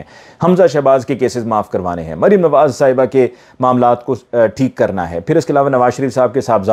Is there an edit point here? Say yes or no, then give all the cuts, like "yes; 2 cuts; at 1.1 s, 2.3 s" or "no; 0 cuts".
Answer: no; 0 cuts